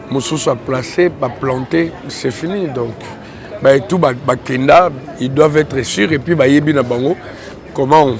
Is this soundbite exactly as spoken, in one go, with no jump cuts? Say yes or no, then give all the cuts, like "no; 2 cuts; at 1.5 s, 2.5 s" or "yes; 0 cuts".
yes; 0 cuts